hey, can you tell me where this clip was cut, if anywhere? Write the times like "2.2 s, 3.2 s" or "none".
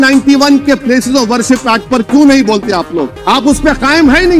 3.1 s